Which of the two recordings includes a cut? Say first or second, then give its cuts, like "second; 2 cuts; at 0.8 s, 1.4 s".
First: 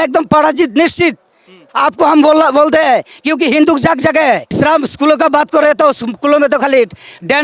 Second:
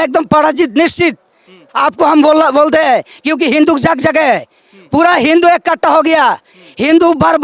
first; 1 cut; at 4.5 s